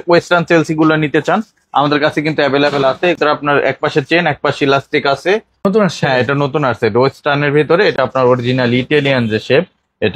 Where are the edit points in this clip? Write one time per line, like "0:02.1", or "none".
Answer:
0:03.2
0:05.6
0:08.0